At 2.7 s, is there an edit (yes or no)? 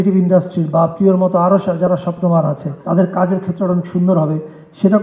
yes